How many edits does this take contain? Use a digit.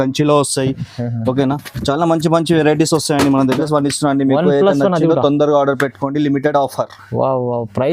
1